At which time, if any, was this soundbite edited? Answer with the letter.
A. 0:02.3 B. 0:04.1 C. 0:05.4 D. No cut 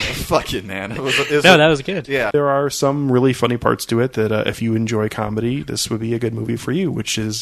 A